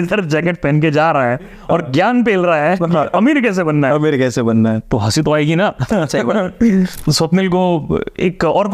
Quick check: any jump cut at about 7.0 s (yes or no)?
yes